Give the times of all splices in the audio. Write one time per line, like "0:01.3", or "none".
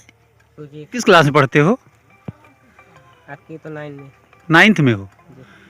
0:01.0